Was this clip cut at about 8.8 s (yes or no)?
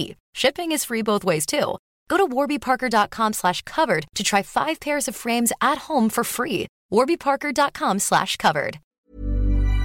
yes